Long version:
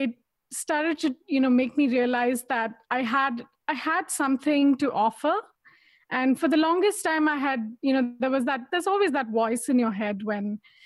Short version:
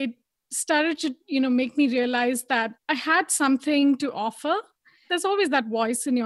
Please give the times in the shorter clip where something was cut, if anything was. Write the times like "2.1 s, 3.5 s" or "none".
2.8 s, 5.0 s